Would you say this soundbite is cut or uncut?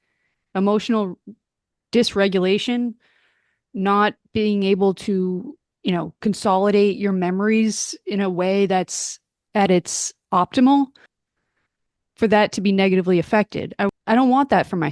cut